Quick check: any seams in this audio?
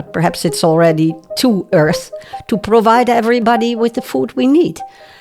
yes; 1 cut; at 3.4 s

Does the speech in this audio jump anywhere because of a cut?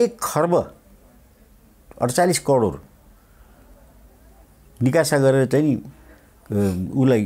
no; 0 cuts

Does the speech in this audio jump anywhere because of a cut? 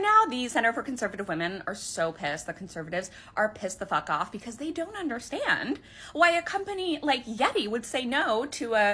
no; 0 cuts

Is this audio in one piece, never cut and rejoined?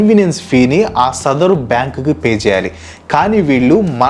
yes; 0 cuts

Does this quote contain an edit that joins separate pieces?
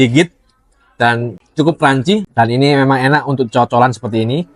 yes; 2 cuts; at 1.3 s, 2.3 s

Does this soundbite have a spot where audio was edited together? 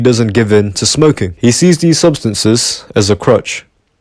yes; 1 cut; at 1.3 s

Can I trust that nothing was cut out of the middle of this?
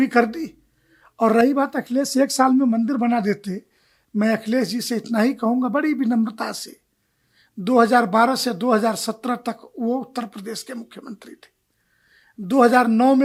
yes; 0 cuts

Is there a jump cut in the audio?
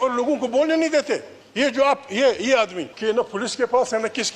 yes; 2 cuts; at 1.4 s, 2.9 s

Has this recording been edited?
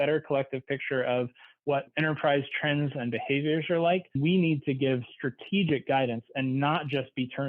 yes; 1 cut; at 4.2 s

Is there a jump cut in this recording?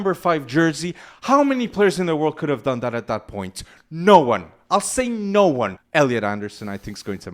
yes; 1 cut; at 5.8 s

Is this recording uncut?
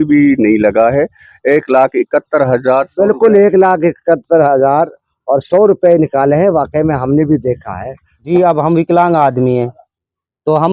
no; 1 cut; at 8.2 s

